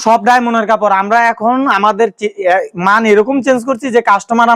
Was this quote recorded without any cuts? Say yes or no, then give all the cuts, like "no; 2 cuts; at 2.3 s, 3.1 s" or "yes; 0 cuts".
yes; 0 cuts